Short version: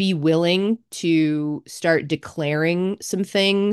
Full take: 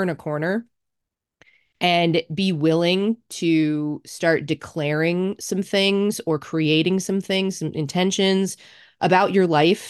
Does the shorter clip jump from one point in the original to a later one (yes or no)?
no